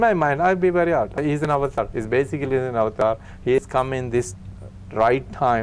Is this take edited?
no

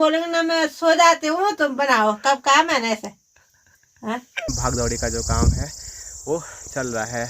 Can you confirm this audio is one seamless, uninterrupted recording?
no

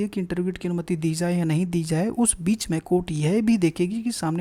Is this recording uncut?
yes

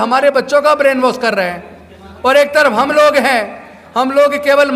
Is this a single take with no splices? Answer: yes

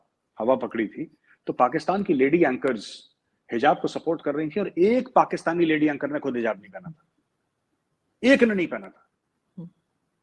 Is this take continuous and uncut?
yes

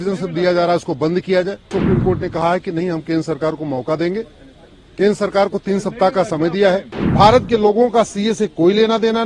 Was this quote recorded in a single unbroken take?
no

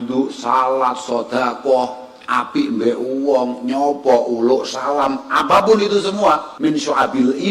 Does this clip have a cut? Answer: yes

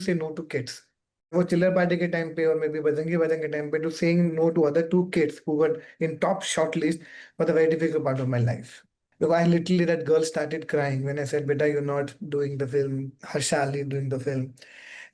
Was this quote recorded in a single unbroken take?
no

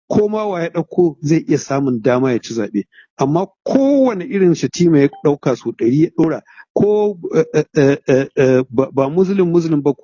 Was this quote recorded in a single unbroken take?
yes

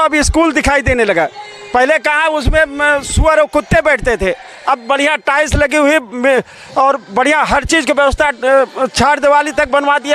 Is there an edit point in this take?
no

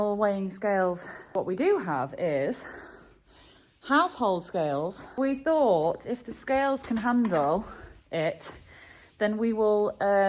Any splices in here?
yes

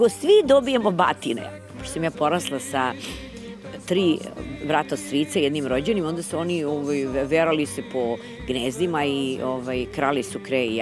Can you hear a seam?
no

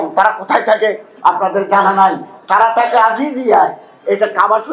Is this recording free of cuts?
yes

